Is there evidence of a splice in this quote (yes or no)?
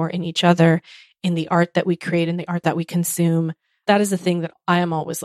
yes